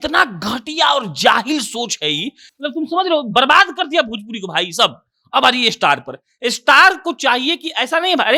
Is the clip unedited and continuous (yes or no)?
yes